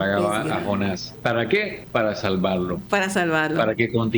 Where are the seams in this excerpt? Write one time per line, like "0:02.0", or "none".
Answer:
0:01.1
0:01.8